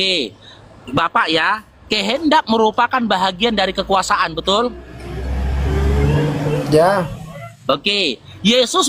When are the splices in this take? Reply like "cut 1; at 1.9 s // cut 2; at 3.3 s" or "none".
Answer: none

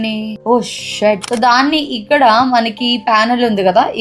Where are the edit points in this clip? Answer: cut 1; at 1.3 s

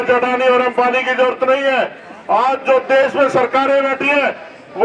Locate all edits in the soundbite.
none

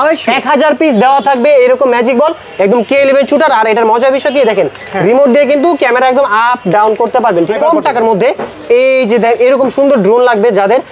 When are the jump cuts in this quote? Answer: cut 1; at 7.6 s

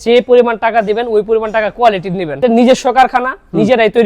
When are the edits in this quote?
cut 1; at 2.4 s

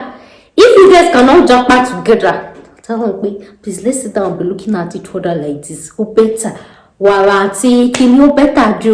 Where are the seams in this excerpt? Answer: none

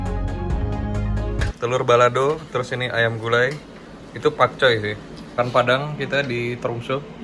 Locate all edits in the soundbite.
cut 1; at 1.4 s // cut 2; at 5.3 s

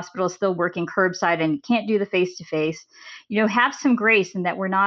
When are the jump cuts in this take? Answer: none

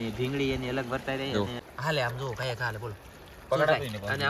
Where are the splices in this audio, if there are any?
cut 1; at 1.6 s

